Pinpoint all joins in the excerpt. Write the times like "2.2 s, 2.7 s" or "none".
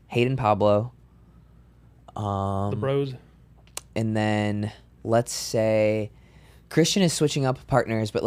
none